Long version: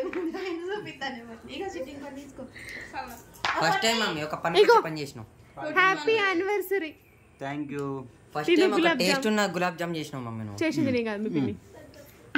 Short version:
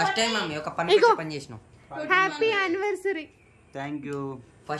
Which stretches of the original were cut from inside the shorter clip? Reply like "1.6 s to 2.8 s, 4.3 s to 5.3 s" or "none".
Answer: none